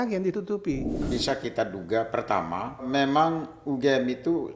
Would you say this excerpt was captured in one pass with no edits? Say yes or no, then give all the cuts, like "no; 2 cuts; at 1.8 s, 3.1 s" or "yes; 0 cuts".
no; 2 cuts; at 1.0 s, 2.9 s